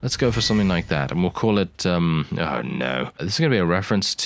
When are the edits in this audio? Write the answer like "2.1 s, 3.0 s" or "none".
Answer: 3.2 s